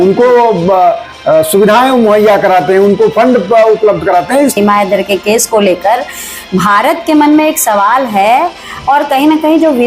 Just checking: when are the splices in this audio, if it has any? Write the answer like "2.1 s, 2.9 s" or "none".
4.5 s

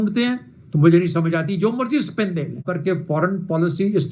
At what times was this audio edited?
2.6 s

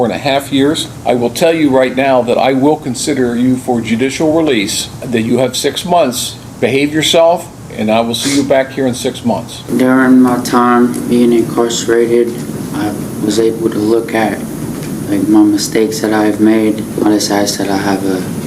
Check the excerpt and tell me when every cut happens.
0.9 s, 5.0 s, 9.6 s, 16.9 s

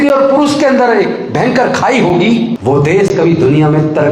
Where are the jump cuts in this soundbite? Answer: 2.6 s

